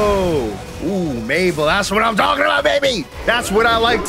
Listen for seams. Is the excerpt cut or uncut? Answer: cut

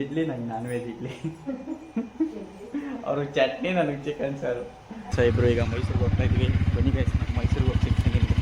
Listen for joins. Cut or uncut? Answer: cut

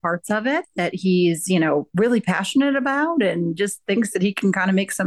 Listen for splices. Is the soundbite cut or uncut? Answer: uncut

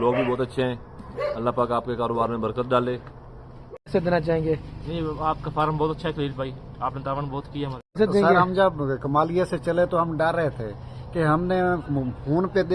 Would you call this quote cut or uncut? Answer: cut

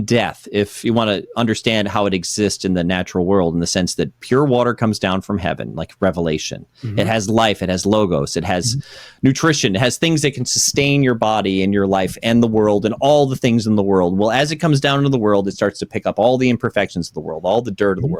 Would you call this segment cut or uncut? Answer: uncut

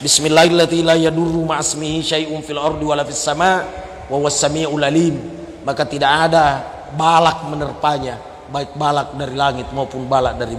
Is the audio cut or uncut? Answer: uncut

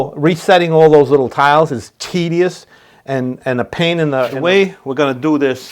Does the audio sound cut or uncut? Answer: cut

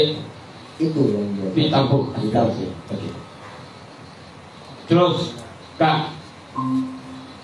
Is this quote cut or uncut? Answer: uncut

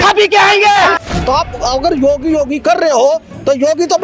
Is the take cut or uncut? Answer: cut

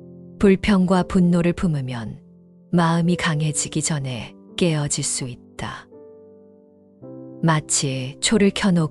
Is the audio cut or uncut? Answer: uncut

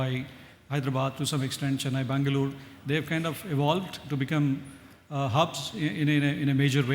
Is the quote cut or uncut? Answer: uncut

